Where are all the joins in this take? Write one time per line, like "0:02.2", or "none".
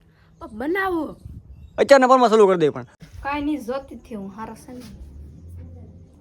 0:02.9